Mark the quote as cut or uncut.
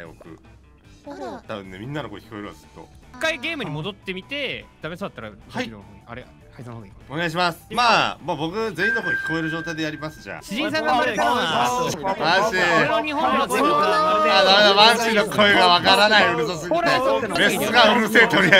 cut